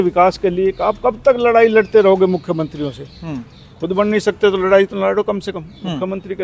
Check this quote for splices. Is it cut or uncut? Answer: uncut